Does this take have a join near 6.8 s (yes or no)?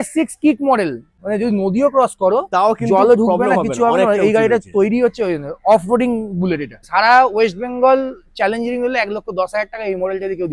yes